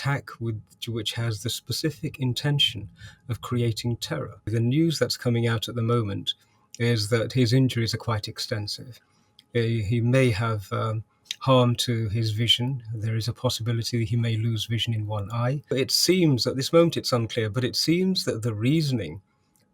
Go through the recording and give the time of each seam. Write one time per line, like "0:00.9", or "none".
0:04.5
0:15.7